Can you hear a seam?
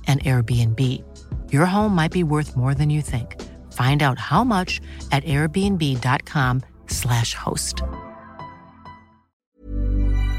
yes; 1 cut; at 9.4 s

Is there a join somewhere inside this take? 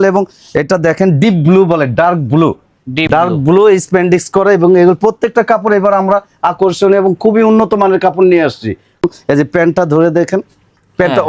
no; 0 cuts

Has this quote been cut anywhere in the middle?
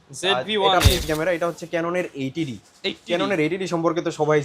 yes; 1 cut; at 1.0 s

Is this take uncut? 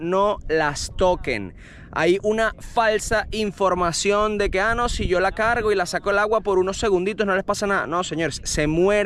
yes; 0 cuts

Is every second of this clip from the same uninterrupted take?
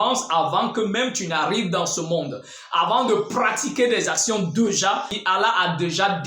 no; 1 cut; at 5.1 s

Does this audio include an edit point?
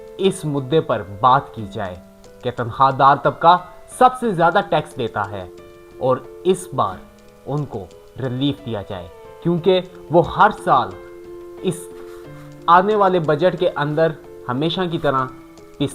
no; 0 cuts

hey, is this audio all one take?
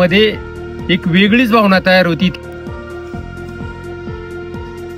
no; 1 cut; at 2.3 s

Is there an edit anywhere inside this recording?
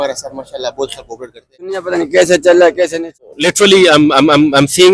yes; 2 cuts; at 1.8 s, 3.2 s

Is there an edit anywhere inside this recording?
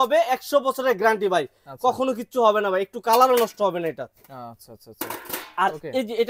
no; 0 cuts

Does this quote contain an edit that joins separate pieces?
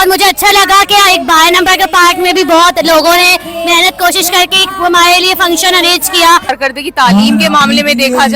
yes; 1 cut; at 6.6 s

